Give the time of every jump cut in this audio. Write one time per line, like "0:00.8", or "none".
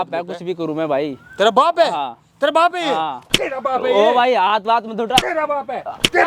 none